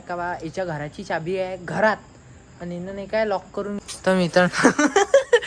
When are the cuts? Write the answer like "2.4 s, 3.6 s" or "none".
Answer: 3.9 s